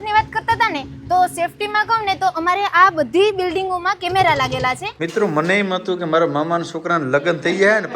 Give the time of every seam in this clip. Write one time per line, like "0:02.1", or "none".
0:04.9